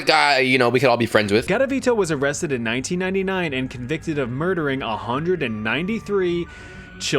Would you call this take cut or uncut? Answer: cut